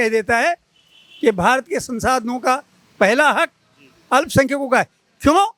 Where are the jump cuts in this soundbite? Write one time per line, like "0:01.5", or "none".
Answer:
none